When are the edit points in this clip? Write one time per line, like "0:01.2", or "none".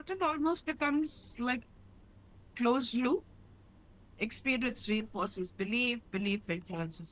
0:01.6